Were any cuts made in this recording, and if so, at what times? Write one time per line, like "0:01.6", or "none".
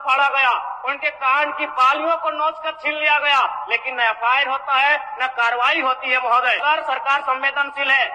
0:06.6